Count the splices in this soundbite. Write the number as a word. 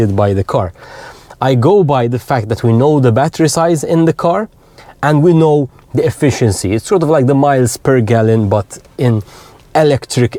zero